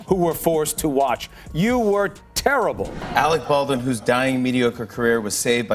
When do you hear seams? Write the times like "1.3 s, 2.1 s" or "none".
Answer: 2.9 s